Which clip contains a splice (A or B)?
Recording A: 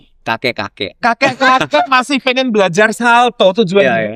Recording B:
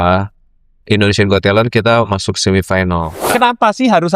B